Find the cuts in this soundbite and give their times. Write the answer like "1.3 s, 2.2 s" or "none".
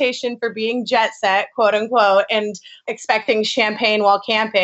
2.8 s